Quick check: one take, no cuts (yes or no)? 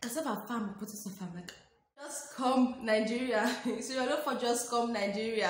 no